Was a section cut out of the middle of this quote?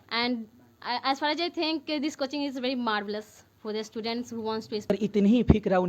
yes; 1 cut; at 4.9 s

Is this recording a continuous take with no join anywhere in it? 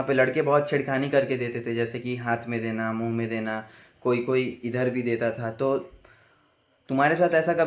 yes; 0 cuts

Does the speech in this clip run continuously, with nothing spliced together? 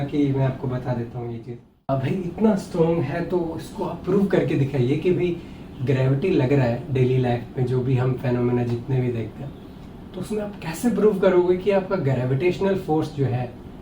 no; 1 cut; at 1.9 s

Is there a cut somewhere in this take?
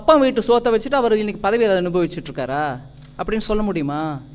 no; 0 cuts

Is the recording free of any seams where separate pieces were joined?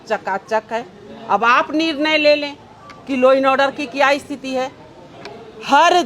yes; 0 cuts

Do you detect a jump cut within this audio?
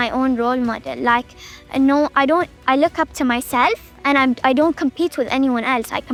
no; 0 cuts

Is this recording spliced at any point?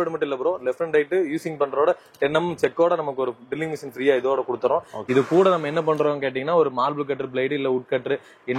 yes; 1 cut; at 4.9 s

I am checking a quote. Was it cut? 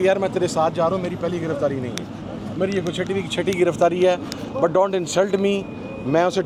no; 0 cuts

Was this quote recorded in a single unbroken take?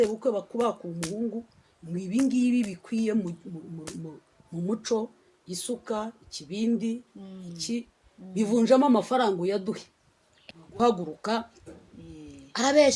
no; 1 cut; at 10.8 s

